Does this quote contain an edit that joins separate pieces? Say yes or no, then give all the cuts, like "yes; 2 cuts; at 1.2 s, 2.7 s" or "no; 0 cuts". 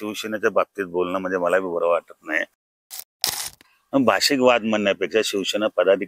yes; 1 cut; at 3.2 s